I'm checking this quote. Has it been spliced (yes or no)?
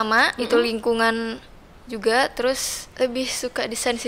yes